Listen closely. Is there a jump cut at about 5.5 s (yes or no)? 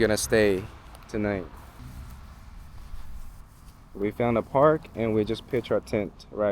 no